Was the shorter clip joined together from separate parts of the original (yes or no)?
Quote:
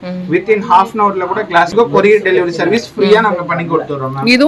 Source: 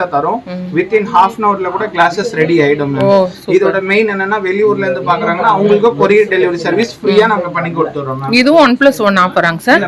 yes